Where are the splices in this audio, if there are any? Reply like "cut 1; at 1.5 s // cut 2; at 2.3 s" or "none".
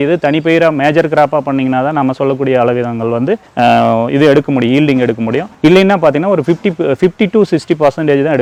none